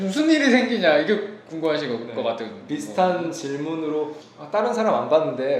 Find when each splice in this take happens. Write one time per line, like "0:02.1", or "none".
none